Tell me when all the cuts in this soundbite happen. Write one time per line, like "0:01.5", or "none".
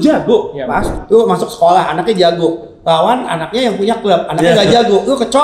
0:01.0